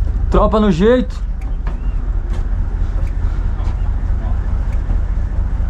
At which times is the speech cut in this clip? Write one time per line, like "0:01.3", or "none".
none